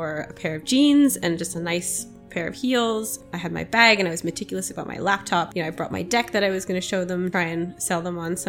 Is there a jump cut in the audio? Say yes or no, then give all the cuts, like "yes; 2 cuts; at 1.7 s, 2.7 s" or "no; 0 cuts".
yes; 3 cuts; at 3.2 s, 5.5 s, 7.3 s